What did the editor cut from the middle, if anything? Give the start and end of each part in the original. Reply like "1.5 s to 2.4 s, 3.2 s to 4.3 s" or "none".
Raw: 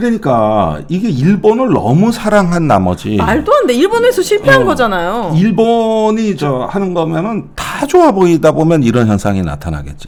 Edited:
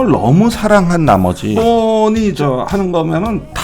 3.2 s to 5.6 s